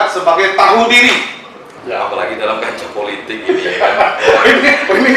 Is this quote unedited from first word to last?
no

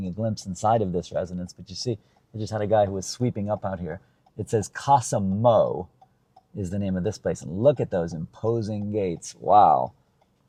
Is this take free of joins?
yes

